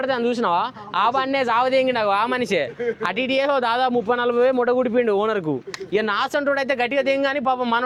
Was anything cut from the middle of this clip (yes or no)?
no